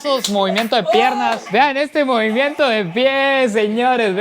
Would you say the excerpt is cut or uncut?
cut